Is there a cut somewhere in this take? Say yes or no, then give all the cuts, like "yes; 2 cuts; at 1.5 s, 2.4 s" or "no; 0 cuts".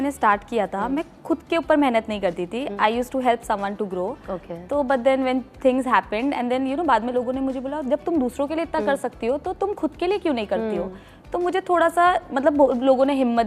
no; 0 cuts